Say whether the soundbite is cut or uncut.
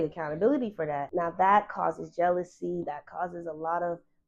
cut